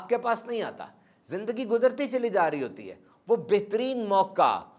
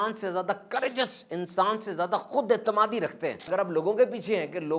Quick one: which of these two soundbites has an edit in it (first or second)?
second